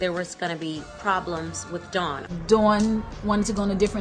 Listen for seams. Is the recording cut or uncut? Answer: cut